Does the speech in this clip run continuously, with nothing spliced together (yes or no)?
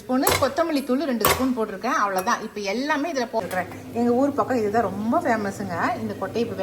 no